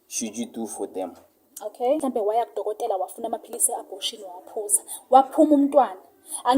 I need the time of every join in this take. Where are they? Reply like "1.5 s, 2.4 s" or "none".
2.0 s